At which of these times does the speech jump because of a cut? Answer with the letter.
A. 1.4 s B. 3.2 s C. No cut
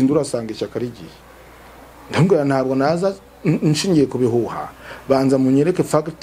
C